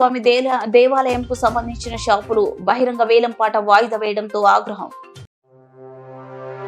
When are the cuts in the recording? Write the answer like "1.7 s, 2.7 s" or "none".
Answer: none